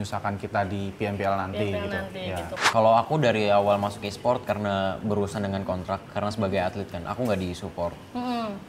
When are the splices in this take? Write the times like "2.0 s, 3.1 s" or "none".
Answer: 2.6 s